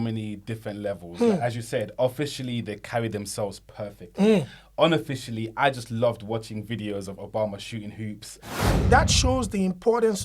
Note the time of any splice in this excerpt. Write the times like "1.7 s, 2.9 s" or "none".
8.7 s